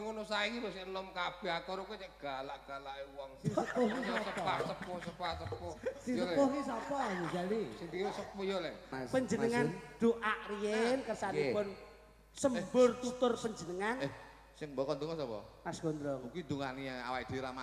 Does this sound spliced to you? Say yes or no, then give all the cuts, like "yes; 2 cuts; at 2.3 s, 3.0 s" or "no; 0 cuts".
yes; 1 cut; at 8.9 s